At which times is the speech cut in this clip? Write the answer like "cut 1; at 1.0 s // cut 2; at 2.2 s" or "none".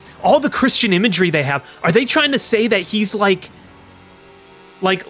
none